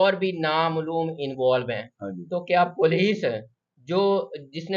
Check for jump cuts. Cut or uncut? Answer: uncut